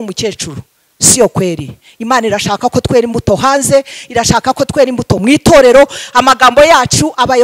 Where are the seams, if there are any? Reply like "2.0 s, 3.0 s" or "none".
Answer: none